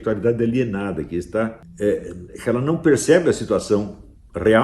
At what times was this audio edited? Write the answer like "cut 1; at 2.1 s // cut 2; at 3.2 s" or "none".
cut 1; at 1.6 s